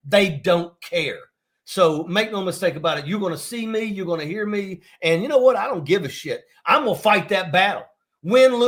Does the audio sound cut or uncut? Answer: uncut